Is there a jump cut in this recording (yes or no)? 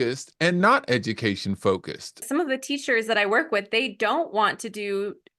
yes